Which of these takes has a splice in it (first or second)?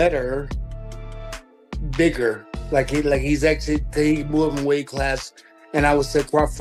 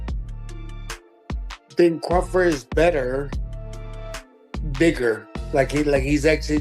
second